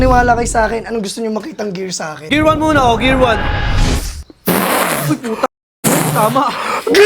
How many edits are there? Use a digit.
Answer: 1